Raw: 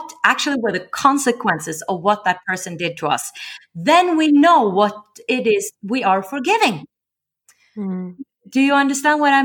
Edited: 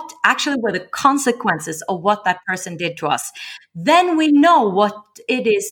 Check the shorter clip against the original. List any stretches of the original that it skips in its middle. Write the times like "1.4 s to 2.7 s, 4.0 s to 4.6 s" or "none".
none